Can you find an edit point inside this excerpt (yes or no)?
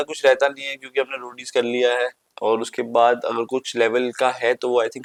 no